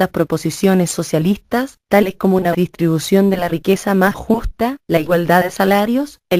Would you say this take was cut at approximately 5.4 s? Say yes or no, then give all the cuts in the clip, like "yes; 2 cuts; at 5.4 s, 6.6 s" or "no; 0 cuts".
no; 0 cuts